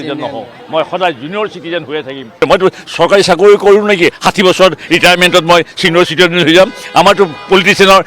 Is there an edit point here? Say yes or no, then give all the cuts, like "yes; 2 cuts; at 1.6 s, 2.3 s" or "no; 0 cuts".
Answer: yes; 1 cut; at 2.4 s